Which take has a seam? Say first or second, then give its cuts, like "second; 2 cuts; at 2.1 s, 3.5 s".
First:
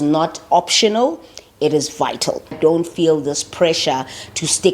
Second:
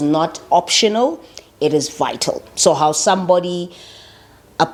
first; 1 cut; at 2.6 s